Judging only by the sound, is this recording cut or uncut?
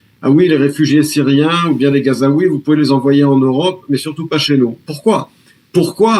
uncut